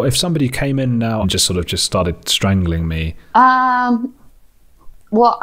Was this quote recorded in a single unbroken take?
no; 2 cuts; at 1.2 s, 3.1 s

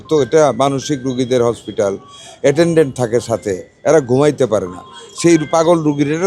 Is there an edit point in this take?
no; 0 cuts

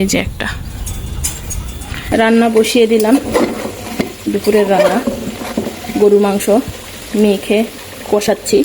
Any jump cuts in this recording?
yes; 1 cut; at 2.1 s

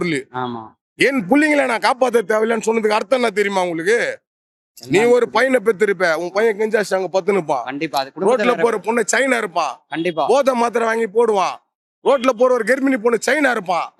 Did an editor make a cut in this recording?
no; 0 cuts

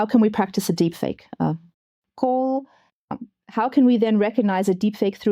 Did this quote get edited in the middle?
yes; 1 cut; at 3.2 s

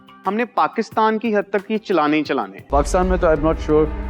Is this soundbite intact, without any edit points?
no; 1 cut; at 2.6 s

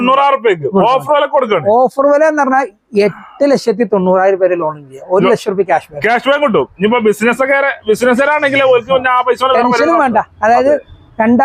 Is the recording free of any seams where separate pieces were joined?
yes; 0 cuts

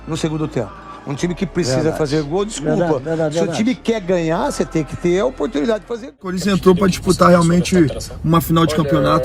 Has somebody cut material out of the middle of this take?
yes; 1 cut; at 6.3 s

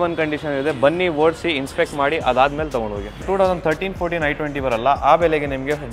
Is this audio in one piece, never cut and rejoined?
no; 1 cut; at 3.2 s

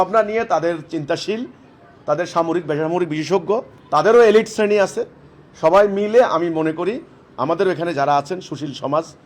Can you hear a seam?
yes; 1 cut; at 3.7 s

